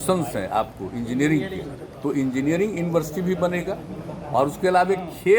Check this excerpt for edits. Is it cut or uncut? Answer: uncut